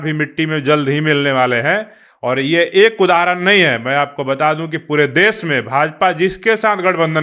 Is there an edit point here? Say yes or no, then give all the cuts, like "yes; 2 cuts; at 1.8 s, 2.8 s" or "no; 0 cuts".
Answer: no; 0 cuts